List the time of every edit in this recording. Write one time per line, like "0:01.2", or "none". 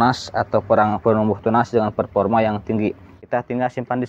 0:03.2